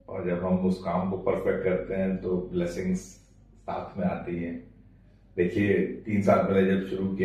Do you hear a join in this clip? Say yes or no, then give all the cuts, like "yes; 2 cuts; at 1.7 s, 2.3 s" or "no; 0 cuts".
no; 0 cuts